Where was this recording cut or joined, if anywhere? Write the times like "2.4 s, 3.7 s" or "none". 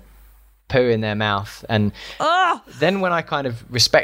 2.7 s